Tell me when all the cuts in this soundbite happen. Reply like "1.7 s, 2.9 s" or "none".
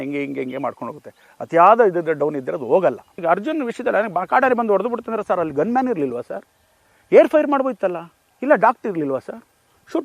3.2 s